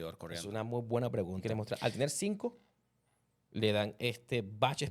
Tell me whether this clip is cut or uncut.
cut